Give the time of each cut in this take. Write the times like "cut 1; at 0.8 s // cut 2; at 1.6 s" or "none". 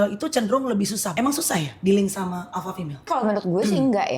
cut 1; at 1.1 s // cut 2; at 3.0 s